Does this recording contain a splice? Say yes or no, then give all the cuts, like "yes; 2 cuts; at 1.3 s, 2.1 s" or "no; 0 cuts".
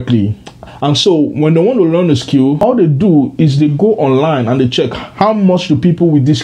yes; 1 cut; at 2.6 s